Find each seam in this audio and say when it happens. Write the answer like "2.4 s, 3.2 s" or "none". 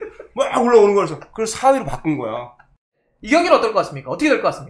3.1 s